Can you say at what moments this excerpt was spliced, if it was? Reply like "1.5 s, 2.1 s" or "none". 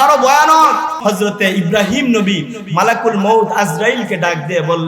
0.9 s

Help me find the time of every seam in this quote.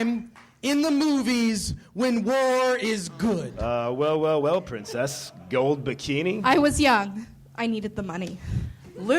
3.5 s, 6.4 s

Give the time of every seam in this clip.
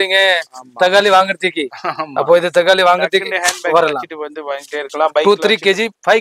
none

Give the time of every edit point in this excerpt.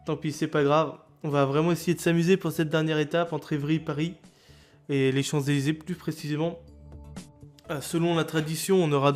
none

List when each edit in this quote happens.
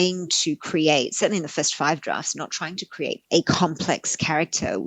3.2 s

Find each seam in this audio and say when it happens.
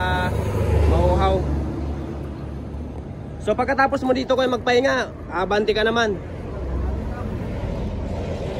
none

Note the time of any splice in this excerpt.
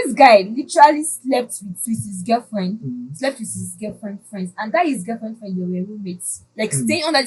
none

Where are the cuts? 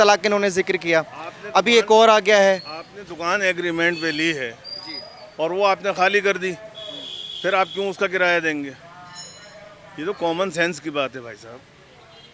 none

